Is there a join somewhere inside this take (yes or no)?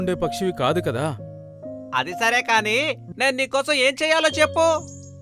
yes